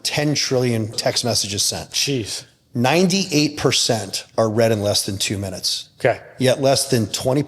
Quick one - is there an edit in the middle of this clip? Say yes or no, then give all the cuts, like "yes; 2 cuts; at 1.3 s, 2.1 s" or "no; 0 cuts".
yes; 1 cut; at 0.9 s